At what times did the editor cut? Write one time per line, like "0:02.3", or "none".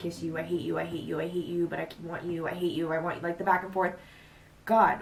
none